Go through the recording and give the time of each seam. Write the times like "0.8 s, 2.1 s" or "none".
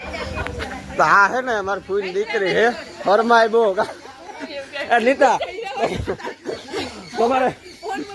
none

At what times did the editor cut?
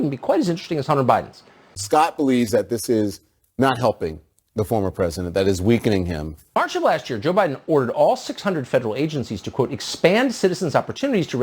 1.8 s, 6.6 s

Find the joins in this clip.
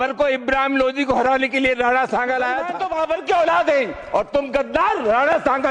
2.8 s

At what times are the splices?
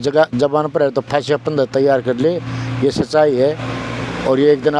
none

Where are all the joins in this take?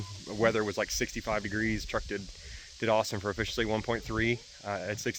none

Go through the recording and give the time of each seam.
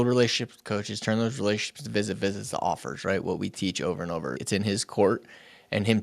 4.4 s

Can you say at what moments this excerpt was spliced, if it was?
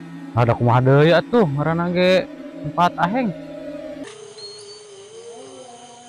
4.1 s

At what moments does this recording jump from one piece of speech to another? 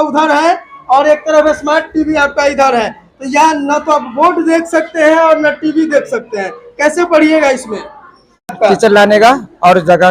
8.5 s

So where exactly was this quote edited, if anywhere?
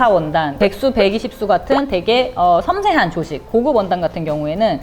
none

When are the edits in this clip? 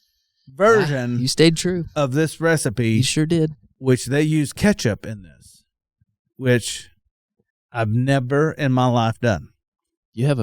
3.7 s

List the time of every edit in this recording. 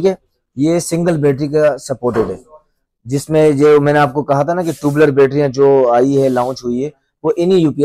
none

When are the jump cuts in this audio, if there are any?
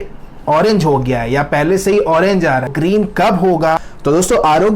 2.7 s, 3.9 s

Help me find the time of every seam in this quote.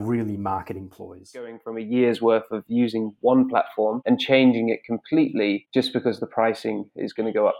1.7 s, 4.0 s, 5.6 s

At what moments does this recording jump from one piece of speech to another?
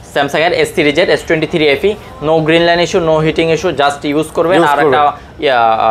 none

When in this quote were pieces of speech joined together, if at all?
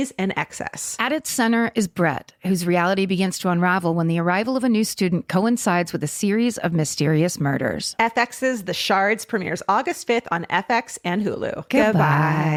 none

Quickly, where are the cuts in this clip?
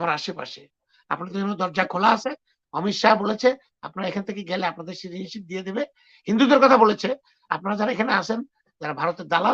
0.9 s

